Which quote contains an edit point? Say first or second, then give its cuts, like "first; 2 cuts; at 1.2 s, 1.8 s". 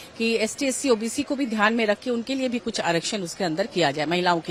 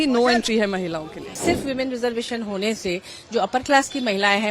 second; 1 cut; at 1.4 s